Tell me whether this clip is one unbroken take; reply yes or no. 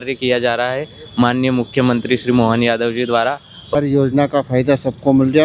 no